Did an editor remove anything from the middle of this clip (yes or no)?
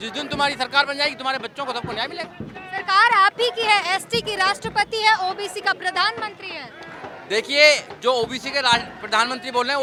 no